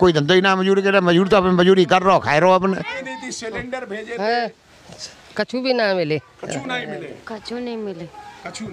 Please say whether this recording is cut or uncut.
cut